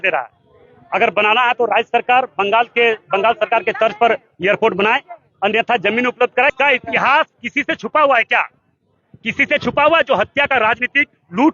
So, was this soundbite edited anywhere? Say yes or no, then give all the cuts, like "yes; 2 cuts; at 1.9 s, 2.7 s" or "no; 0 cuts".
yes; 1 cut; at 6.5 s